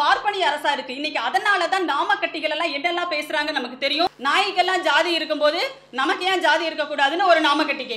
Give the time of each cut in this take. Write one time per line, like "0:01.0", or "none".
0:04.1